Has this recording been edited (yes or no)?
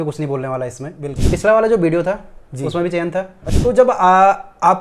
yes